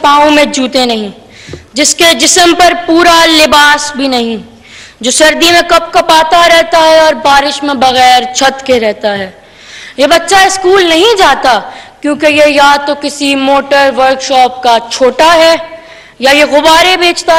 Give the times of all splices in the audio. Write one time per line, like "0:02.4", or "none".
none